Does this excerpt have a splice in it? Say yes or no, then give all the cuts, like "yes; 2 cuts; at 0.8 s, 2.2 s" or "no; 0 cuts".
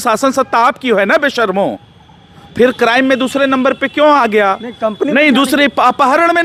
no; 0 cuts